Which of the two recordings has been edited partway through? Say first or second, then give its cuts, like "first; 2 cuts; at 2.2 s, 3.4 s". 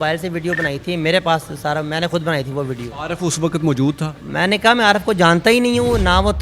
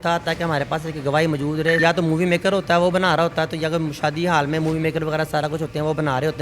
second; 1 cut; at 1.8 s